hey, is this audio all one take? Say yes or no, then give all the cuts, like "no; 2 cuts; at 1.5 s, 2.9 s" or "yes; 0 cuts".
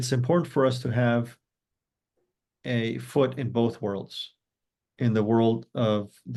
yes; 0 cuts